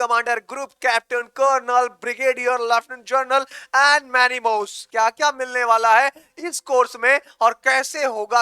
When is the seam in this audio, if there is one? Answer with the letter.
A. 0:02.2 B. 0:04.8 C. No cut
B